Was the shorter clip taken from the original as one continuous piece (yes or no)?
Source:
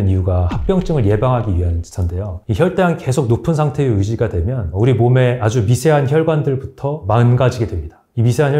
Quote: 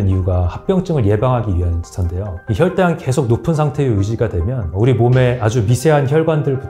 yes